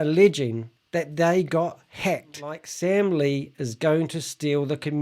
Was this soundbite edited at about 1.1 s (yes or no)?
no